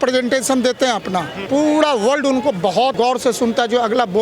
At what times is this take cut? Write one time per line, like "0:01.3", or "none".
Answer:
0:01.4
0:02.9